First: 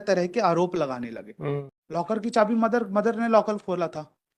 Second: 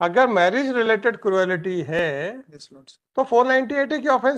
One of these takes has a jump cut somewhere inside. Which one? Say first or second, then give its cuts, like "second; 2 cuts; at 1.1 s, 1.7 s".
first; 1 cut; at 1.8 s